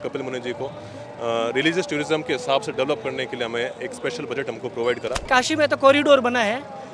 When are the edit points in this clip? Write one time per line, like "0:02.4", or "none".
0:05.2

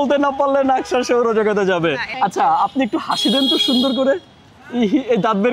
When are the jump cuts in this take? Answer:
0:02.1

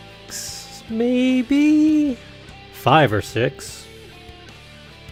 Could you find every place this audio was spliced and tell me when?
none

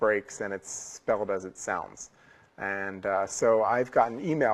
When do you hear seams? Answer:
none

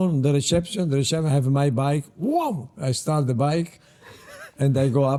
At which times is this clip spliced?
none

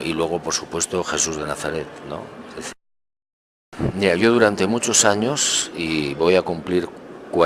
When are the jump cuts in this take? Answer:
0:02.4

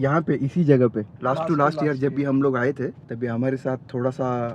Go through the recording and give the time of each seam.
0:01.1
0:03.0

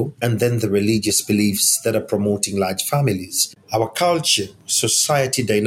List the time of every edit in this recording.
0:03.6

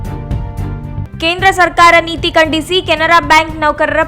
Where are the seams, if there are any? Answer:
0:01.0

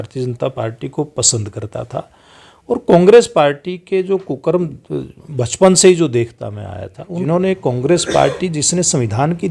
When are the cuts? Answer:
0:07.2

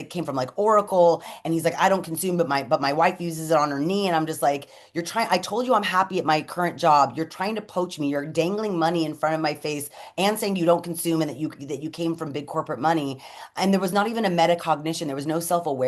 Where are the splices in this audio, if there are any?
none

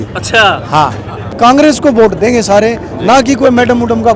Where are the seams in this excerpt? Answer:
0:01.4

